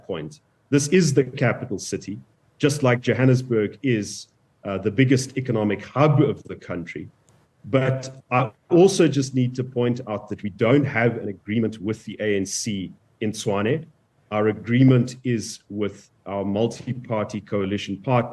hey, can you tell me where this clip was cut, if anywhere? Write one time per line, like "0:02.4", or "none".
none